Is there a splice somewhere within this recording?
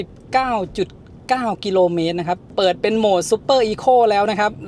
yes; 1 cut; at 2.5 s

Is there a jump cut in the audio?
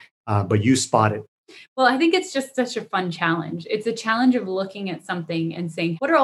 no; 0 cuts

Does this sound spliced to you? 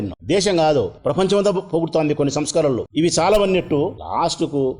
yes; 1 cut; at 2.8 s

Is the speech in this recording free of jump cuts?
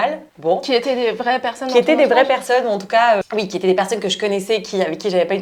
yes; 0 cuts

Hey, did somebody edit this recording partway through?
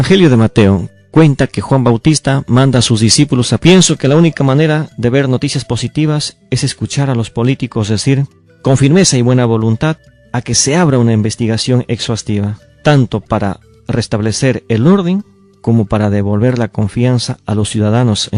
no; 0 cuts

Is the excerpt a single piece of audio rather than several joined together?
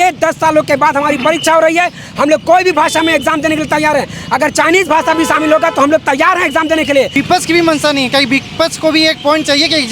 no; 1 cut; at 7.1 s

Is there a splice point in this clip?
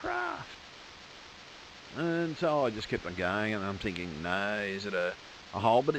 yes; 1 cut; at 4.8 s

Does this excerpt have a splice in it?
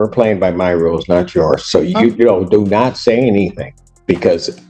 no; 0 cuts

